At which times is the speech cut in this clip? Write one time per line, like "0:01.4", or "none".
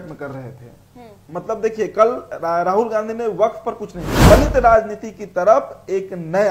0:04.3

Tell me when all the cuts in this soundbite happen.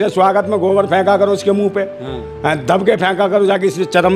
none

